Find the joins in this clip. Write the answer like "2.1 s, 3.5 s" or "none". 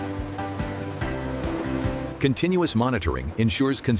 none

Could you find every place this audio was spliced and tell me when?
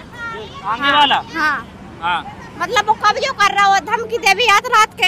none

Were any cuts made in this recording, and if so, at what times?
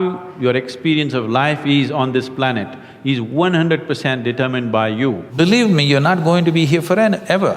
5.2 s

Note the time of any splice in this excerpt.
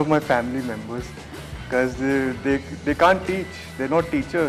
none

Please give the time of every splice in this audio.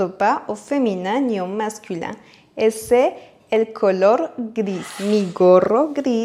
4.9 s

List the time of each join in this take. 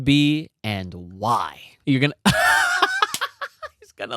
1.7 s

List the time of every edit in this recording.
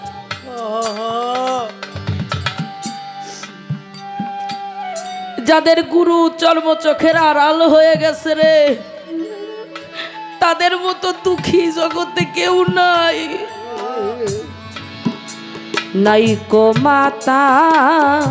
13.9 s

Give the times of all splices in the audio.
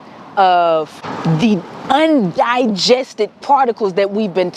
1.0 s

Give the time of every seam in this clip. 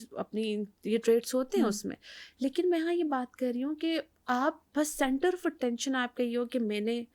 none

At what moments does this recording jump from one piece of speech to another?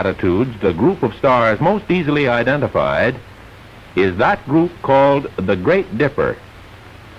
none

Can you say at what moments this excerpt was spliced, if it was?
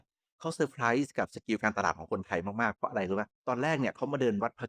3.3 s

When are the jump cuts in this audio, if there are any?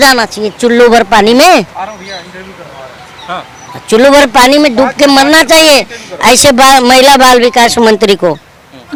none

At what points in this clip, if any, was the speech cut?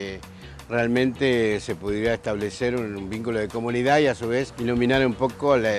4.5 s

